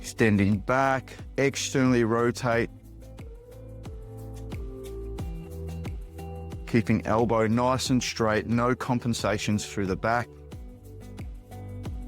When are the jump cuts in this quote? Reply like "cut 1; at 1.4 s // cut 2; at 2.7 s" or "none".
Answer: none